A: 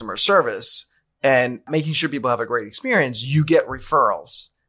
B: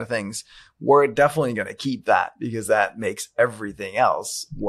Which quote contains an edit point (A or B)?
A